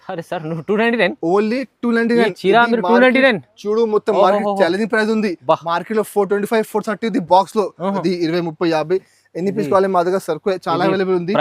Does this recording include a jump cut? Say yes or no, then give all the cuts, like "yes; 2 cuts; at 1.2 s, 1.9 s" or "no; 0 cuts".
yes; 1 cut; at 8.0 s